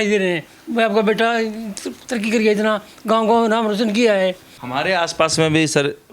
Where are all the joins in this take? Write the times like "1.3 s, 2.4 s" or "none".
4.5 s